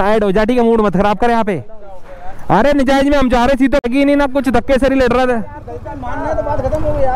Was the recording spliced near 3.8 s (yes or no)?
yes